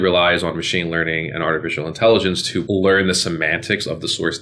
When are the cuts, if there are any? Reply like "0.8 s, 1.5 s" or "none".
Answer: 2.6 s